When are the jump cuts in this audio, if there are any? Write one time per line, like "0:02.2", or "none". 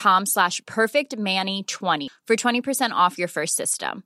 0:02.1